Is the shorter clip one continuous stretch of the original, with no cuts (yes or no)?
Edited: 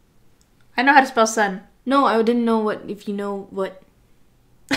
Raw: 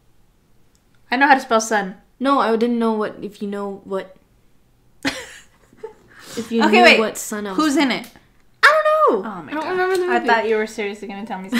yes